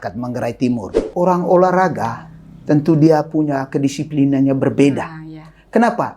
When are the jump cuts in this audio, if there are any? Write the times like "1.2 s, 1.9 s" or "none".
1.0 s